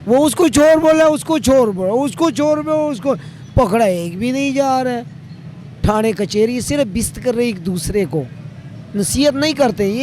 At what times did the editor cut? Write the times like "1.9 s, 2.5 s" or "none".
none